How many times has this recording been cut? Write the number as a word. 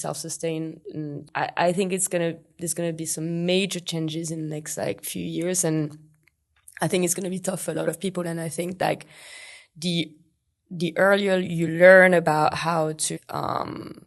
two